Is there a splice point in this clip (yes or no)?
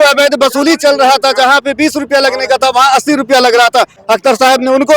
yes